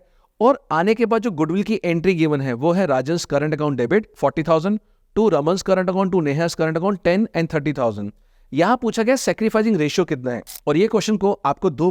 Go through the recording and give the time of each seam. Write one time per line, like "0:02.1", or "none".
0:10.5